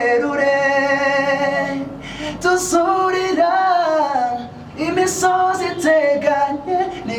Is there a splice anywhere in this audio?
no; 0 cuts

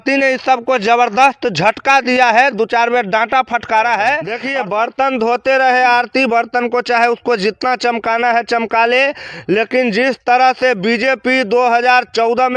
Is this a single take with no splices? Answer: no; 1 cut; at 4.3 s

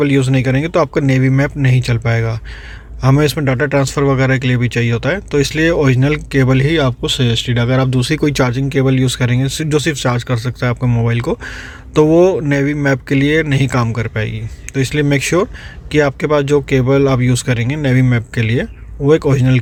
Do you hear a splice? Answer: no; 0 cuts

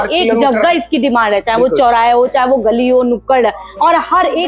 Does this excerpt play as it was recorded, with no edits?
yes; 0 cuts

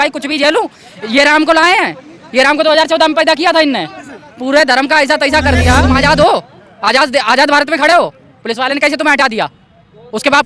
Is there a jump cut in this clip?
yes; 1 cut; at 5.9 s

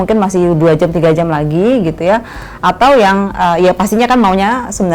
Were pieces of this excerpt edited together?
no; 0 cuts

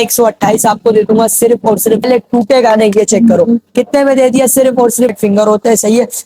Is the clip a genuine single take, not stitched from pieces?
no; 2 cuts; at 2.0 s, 5.1 s

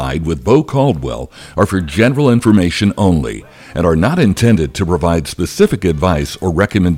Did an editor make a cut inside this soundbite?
no; 0 cuts

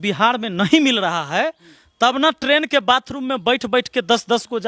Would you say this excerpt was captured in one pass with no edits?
yes; 0 cuts

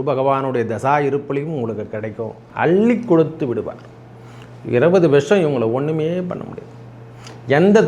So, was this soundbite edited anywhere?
yes; 1 cut; at 2.4 s

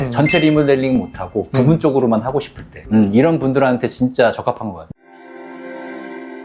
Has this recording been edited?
no; 0 cuts

